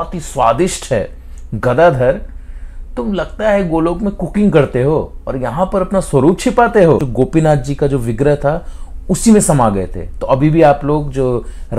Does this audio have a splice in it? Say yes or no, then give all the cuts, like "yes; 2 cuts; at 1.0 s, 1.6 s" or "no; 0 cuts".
yes; 1 cut; at 7.1 s